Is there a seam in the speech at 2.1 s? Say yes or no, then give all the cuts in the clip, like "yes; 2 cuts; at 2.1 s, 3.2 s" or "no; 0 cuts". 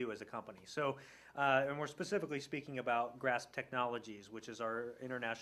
no; 1 cut; at 4.1 s